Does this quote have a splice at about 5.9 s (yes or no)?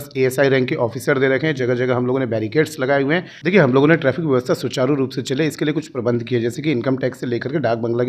no